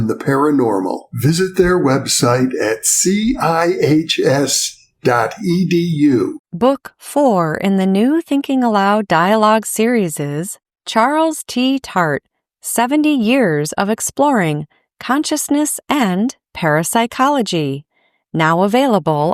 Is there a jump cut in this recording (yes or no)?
yes